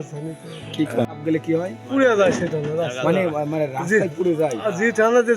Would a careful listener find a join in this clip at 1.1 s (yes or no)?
yes